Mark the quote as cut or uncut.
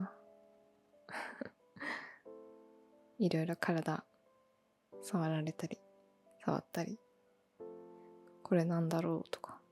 cut